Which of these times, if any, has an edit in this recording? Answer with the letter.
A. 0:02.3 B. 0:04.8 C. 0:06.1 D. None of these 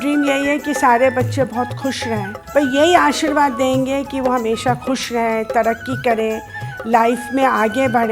A